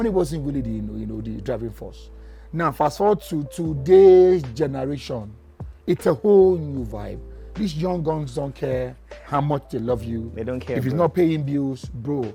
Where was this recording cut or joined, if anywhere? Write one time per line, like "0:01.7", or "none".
none

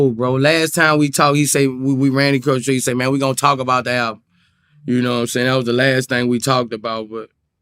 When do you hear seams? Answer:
none

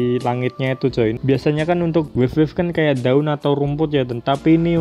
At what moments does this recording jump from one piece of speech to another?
0:01.2

